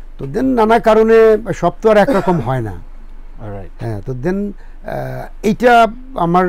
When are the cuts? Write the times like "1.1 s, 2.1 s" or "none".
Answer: none